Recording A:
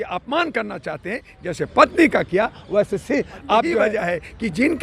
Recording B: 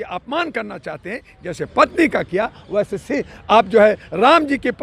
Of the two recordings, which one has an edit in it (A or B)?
A